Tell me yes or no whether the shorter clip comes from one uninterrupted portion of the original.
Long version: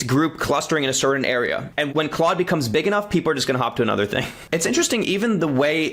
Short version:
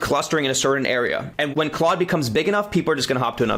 yes